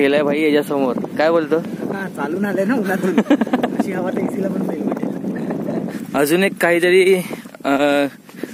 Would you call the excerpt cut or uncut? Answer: cut